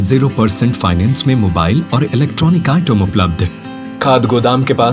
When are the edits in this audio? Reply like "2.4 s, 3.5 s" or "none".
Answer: 4.0 s